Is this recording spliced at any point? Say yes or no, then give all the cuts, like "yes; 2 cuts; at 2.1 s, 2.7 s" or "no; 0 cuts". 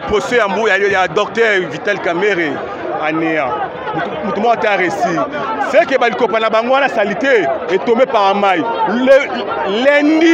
no; 0 cuts